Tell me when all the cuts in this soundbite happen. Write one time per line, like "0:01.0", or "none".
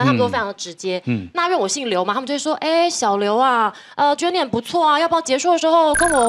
none

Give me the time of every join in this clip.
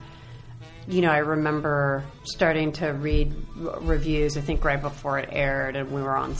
0:02.2

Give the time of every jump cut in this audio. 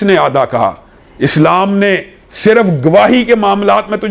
none

